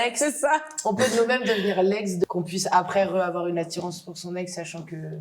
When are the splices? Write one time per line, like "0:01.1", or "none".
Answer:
0:02.2